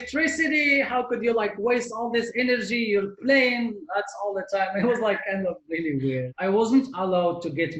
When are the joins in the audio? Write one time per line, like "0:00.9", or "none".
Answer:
0:06.3